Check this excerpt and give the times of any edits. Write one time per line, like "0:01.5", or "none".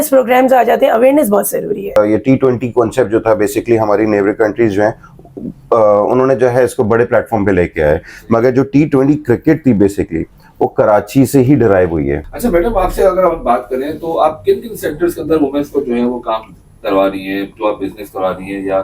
0:02.0
0:12.3